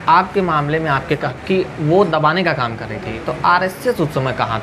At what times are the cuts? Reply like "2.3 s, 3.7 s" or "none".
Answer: 1.3 s